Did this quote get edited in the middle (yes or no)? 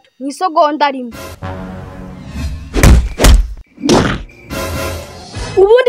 yes